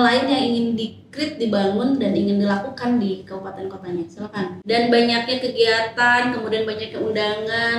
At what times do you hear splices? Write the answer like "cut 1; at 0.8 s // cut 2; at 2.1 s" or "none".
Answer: cut 1; at 4.5 s